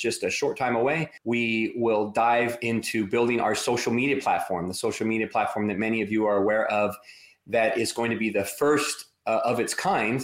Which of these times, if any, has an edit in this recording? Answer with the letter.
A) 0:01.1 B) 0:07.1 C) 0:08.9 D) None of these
A